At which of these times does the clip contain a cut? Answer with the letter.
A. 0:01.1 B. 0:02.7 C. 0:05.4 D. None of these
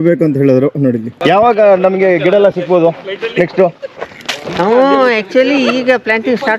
A